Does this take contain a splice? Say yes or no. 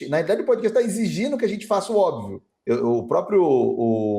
yes